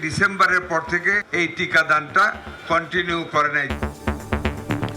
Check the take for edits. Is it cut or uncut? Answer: cut